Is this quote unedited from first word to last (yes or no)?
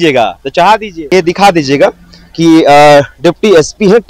no